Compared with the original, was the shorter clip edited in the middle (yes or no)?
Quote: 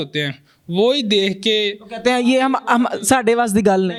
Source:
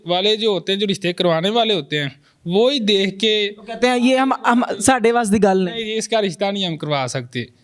no